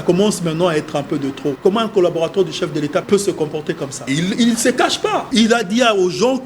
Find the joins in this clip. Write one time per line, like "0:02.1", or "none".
0:01.6
0:03.0
0:03.9
0:05.3